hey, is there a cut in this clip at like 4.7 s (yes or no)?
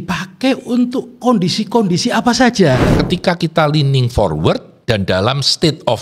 yes